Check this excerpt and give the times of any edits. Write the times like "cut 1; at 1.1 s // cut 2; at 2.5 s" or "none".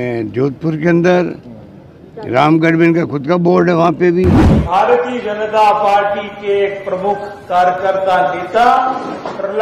cut 1; at 4.5 s